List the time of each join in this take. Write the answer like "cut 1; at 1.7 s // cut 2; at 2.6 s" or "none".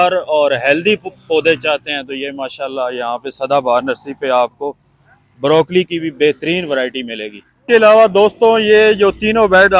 cut 1; at 7.6 s